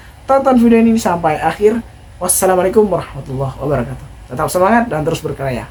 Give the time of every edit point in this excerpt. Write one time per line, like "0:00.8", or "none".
none